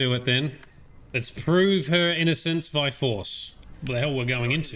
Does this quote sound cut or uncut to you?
cut